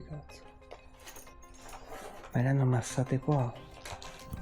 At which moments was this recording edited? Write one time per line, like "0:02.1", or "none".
0:01.4